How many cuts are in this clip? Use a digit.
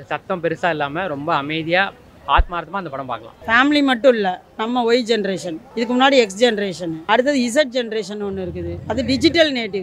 3